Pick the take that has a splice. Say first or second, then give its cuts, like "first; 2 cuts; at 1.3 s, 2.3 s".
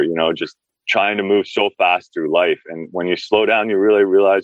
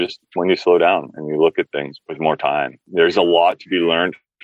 second; 2 cuts; at 2.0 s, 2.8 s